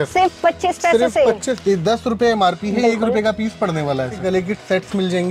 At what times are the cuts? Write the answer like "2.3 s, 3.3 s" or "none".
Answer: 1.6 s, 4.2 s